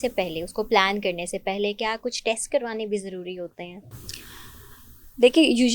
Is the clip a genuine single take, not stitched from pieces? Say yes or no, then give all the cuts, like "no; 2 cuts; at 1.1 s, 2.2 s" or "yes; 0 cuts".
yes; 0 cuts